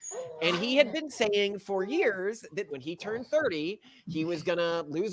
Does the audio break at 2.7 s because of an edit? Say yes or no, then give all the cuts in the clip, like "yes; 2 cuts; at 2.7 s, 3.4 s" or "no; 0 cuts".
yes; 1 cut; at 2.7 s